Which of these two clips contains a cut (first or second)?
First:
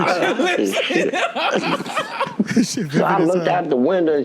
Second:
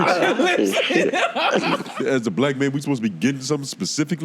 second